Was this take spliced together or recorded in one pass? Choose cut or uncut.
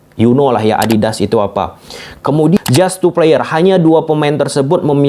cut